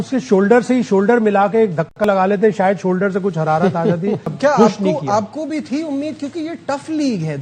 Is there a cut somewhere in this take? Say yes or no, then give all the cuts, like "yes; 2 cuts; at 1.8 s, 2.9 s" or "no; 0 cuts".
yes; 1 cut; at 4.3 s